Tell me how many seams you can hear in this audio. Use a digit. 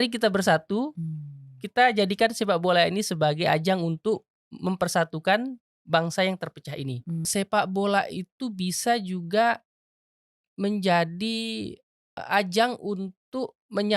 2